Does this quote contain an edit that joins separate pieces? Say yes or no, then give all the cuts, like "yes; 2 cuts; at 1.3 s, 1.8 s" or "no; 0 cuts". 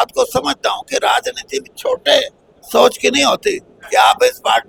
no; 0 cuts